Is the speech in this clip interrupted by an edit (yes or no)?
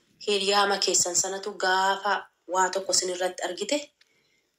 no